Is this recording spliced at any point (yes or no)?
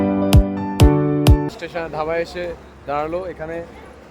yes